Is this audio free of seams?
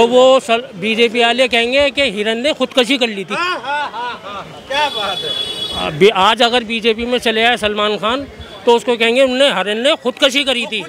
yes; 0 cuts

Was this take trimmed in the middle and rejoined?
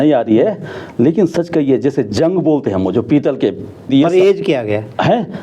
yes; 1 cut; at 3.9 s

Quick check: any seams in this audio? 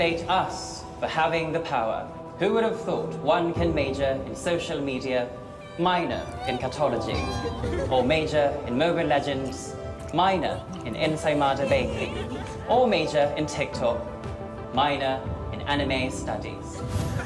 yes; 1 cut; at 1.4 s

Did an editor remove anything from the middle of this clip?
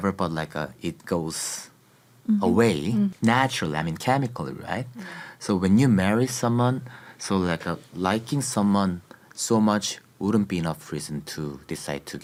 no; 0 cuts

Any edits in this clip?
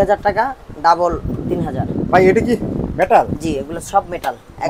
no; 0 cuts

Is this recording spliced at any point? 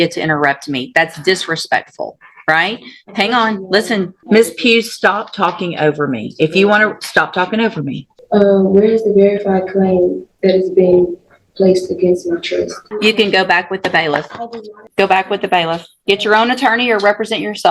yes; 4 cuts; at 4.2 s, 8.1 s, 12.8 s, 14.8 s

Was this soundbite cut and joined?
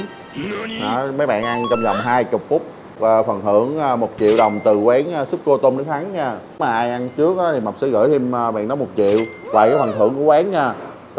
yes; 2 cuts; at 3.0 s, 6.7 s

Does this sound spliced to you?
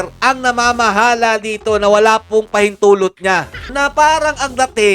yes; 1 cut; at 3.7 s

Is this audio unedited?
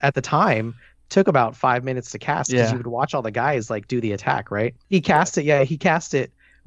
no; 1 cut; at 4.8 s

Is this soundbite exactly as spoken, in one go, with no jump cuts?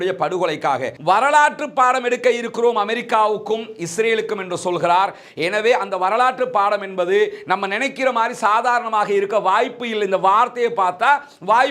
no; 1 cut; at 0.9 s

